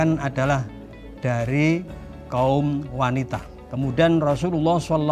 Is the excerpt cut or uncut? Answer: cut